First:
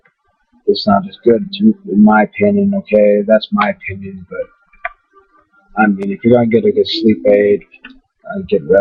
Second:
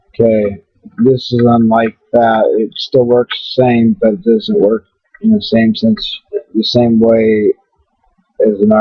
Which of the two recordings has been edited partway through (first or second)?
second